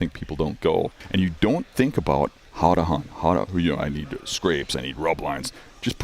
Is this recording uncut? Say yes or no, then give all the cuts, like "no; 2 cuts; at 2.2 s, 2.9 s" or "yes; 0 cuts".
no; 2 cuts; at 1.0 s, 2.4 s